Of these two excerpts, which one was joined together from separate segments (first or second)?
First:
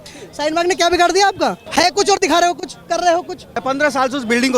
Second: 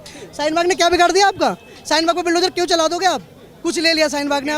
first